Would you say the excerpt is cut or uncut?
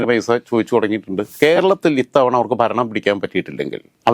cut